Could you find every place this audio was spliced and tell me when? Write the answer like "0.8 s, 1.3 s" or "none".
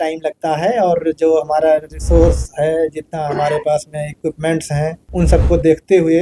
5.0 s